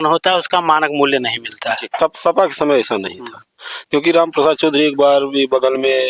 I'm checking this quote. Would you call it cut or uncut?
cut